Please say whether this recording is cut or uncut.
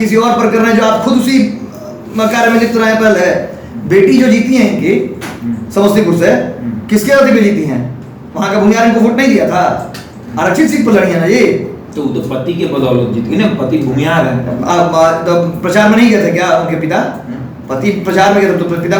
uncut